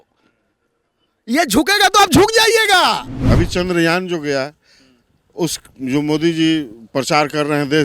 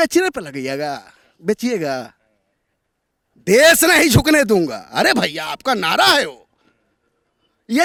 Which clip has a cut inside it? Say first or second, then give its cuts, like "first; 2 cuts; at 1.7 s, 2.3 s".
first; 1 cut; at 3.2 s